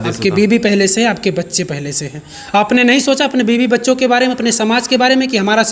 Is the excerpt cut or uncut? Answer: uncut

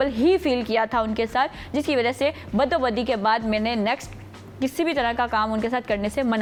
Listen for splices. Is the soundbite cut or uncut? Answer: uncut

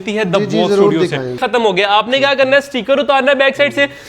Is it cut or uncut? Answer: cut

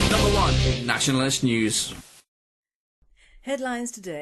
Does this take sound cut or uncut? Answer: uncut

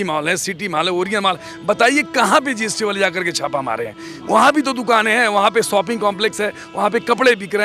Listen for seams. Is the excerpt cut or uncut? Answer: uncut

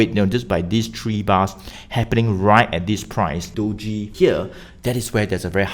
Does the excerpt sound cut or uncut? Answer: cut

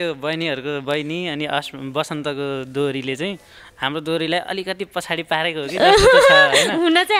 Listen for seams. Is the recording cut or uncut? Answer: uncut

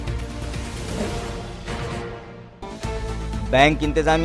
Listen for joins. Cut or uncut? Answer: uncut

